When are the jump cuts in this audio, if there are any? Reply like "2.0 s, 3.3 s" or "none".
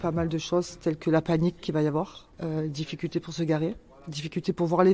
2.2 s